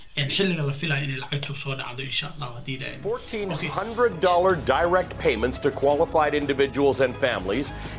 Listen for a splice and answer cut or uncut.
cut